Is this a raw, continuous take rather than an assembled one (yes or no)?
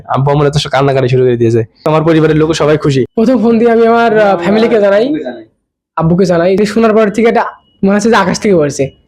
no